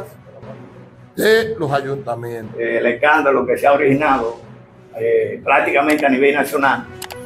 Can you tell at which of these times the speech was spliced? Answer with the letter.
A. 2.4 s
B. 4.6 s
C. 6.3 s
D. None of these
A